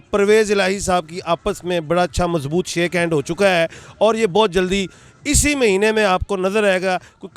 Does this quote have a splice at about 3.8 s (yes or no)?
no